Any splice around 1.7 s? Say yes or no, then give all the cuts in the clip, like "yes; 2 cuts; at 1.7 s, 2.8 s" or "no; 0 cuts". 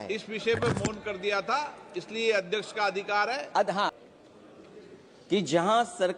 no; 1 cut; at 3.9 s